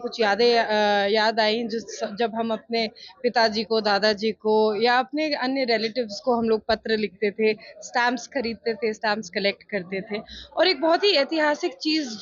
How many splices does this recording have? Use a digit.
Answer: 0